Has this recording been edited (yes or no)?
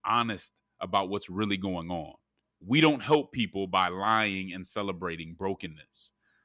yes